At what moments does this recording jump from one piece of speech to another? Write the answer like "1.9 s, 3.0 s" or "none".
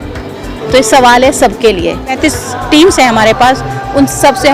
2.2 s